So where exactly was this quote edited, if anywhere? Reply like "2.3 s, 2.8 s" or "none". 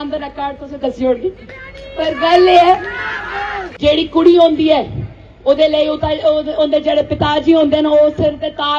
3.6 s